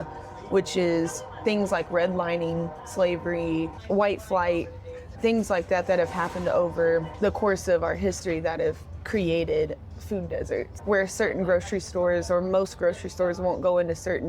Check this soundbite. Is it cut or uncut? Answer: cut